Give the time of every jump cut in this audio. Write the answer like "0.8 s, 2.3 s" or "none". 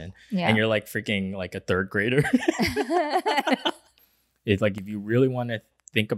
4.0 s